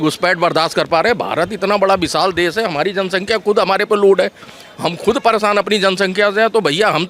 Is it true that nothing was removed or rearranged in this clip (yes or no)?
yes